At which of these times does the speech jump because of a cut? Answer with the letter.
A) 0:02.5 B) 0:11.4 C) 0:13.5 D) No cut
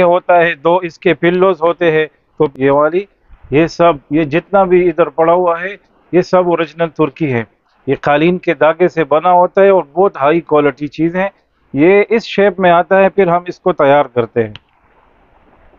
A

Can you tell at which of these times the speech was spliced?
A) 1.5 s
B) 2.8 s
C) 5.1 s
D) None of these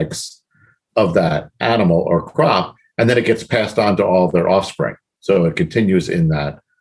D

